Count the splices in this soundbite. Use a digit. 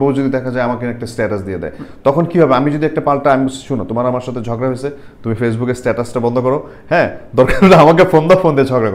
0